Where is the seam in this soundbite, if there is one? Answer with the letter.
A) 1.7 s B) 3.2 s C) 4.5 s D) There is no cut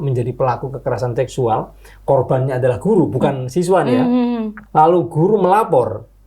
C